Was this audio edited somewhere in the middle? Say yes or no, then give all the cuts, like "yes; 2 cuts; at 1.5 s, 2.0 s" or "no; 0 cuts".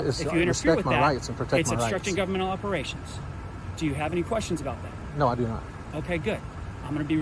no; 0 cuts